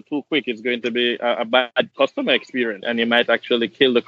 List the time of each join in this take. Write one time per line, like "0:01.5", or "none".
0:01.8
0:02.8